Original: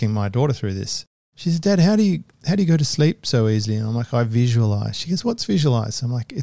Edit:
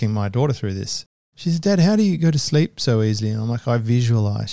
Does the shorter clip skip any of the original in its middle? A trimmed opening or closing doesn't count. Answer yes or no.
yes